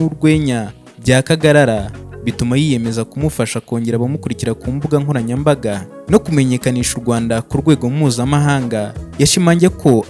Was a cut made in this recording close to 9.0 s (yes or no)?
yes